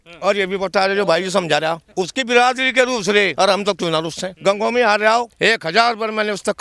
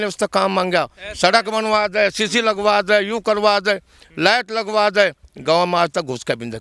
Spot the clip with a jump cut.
first; 4 cuts; at 1.8 s, 3.3 s, 4.3 s, 5.3 s

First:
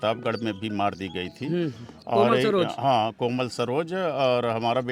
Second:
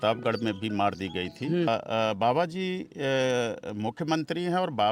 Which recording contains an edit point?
second; 1 cut; at 1.7 s

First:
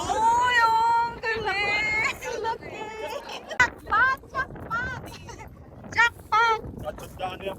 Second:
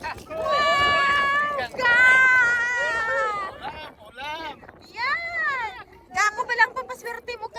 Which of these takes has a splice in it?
first; 1 cut; at 3.6 s

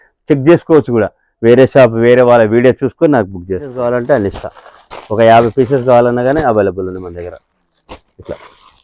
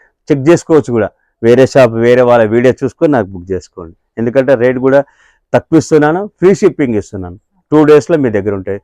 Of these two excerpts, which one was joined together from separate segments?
first; 1 cut; at 3.7 s

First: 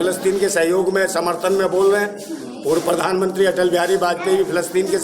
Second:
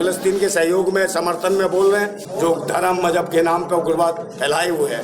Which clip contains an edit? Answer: second; 1 cut; at 2.2 s

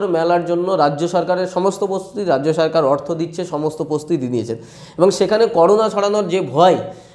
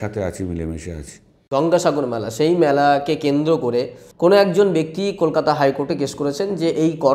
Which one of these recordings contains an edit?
second; 1 cut; at 1.4 s

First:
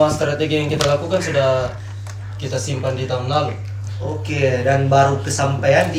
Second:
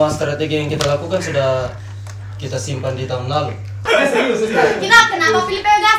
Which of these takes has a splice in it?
second; 1 cut; at 3.8 s

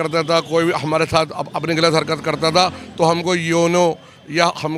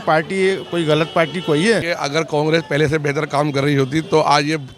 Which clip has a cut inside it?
second; 1 cut; at 1.9 s

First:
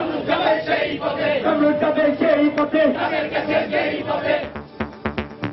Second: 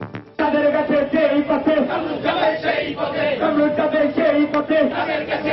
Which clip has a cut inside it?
first; 1 cut; at 4.5 s

